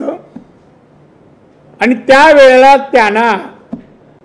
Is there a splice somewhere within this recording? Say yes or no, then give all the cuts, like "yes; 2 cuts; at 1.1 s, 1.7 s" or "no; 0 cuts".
no; 0 cuts